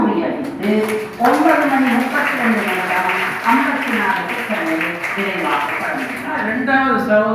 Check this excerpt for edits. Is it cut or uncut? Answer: cut